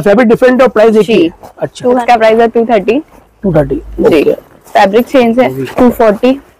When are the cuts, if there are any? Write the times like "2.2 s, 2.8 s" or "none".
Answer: 1.8 s, 5.6 s

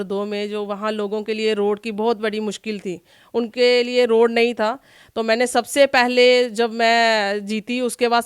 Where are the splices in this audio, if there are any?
none

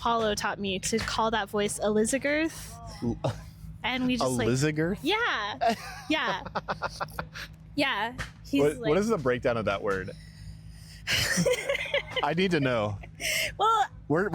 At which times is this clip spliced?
none

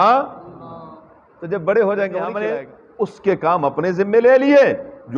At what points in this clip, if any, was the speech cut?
2.4 s

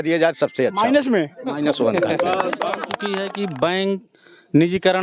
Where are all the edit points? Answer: 2.9 s

